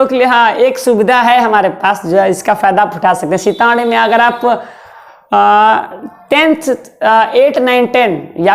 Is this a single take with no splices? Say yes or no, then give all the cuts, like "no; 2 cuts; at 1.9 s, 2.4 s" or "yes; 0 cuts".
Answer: yes; 0 cuts